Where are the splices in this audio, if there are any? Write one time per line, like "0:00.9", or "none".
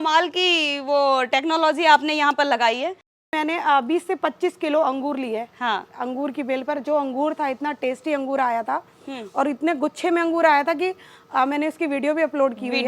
0:03.3